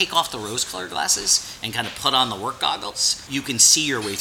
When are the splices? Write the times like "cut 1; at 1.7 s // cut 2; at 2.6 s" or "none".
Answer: cut 1; at 3.2 s